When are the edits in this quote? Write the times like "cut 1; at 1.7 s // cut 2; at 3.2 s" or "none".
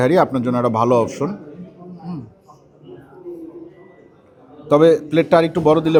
none